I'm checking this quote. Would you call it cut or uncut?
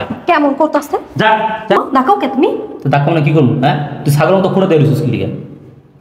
cut